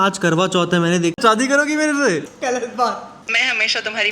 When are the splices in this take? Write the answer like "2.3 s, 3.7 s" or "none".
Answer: 1.2 s, 3.1 s